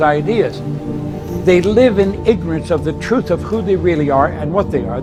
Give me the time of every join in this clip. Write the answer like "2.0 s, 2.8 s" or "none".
none